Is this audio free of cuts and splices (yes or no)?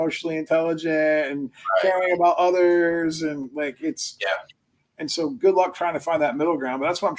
yes